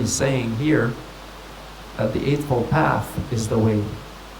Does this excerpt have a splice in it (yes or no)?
no